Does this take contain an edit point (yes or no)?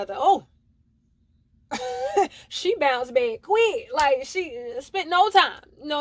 no